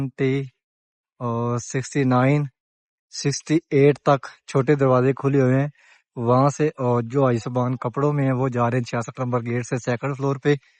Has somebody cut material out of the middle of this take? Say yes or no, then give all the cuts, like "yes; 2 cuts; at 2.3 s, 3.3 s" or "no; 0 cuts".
no; 0 cuts